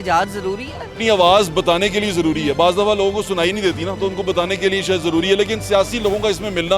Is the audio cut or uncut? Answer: cut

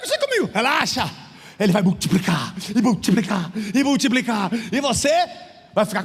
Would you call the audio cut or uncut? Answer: uncut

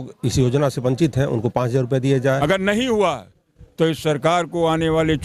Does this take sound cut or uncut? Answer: cut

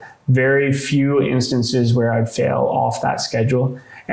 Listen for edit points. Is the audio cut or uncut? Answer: uncut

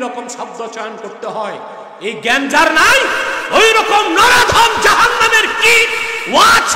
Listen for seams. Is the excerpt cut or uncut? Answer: uncut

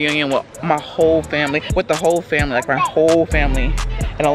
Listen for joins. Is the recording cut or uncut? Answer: cut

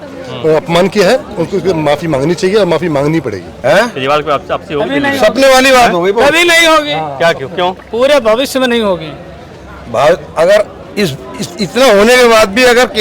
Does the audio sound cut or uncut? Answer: cut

